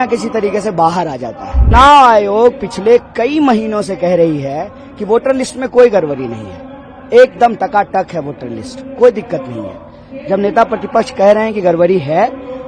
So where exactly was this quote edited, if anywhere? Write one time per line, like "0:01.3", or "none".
0:01.7